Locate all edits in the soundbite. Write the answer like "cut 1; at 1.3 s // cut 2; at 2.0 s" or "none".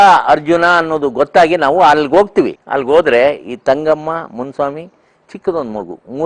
cut 1; at 2.6 s